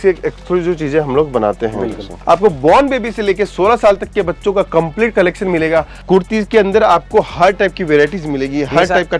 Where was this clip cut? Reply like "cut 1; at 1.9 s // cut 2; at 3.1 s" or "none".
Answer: cut 1; at 2.1 s // cut 2; at 5.9 s